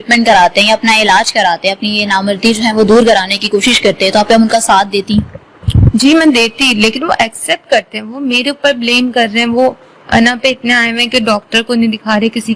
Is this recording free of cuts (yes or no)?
yes